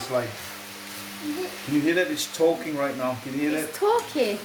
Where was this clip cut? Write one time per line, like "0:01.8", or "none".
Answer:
none